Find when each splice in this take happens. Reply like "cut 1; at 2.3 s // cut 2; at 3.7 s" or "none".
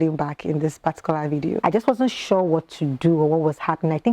cut 1; at 1.6 s